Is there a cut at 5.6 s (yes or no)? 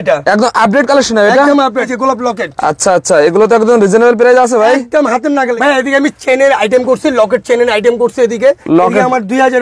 yes